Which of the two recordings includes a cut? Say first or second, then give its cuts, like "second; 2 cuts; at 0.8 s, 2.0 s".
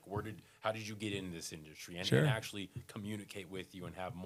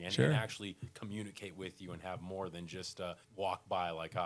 second; 1 cut; at 3.2 s